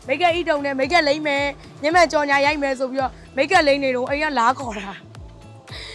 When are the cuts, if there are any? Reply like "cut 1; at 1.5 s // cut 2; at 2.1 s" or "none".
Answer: none